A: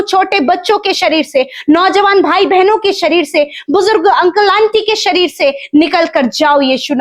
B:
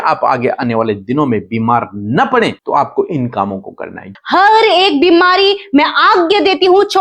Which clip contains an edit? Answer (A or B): B